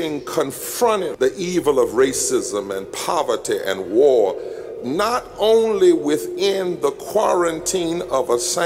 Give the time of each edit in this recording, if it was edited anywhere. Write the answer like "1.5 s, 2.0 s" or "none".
1.1 s

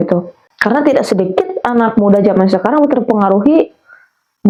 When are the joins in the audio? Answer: none

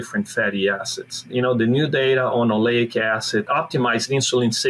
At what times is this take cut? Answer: 1.3 s, 3.5 s

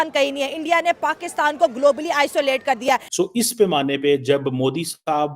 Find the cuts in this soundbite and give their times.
3.1 s

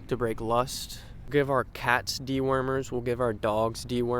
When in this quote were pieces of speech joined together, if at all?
1.3 s

